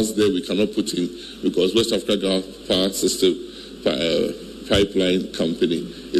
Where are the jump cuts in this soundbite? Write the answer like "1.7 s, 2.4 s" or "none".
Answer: none